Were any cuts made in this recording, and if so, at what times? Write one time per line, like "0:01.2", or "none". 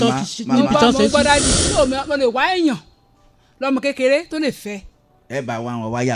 0:01.6